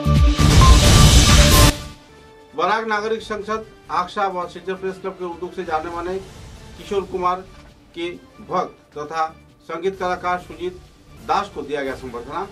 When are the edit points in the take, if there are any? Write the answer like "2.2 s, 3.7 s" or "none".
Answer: 1.7 s